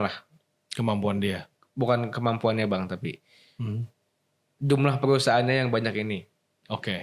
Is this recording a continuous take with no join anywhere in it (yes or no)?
yes